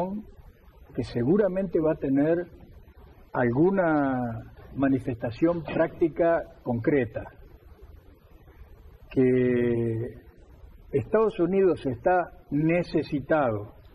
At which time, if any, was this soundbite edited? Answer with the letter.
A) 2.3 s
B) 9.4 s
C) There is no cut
B